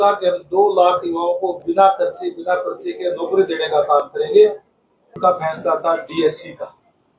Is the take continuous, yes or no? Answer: no